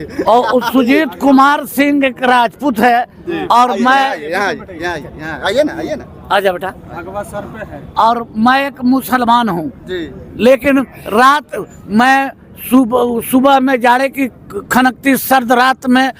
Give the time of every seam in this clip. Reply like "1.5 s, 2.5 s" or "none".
none